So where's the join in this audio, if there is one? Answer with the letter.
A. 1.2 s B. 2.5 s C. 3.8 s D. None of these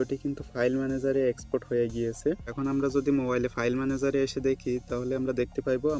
B